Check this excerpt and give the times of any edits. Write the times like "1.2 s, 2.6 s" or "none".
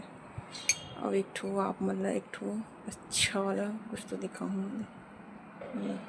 none

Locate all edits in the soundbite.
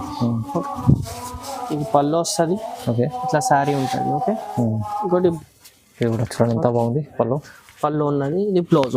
5.4 s

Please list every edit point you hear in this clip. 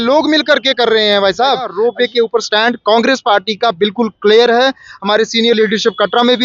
1.7 s

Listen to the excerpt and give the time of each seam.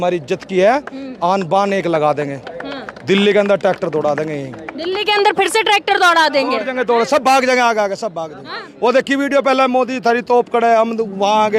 none

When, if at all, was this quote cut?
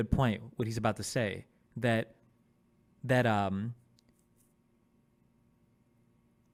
none

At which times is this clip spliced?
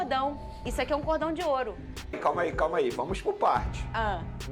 2.2 s

